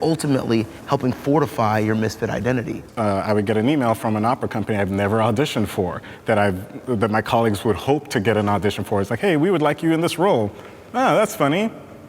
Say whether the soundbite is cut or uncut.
cut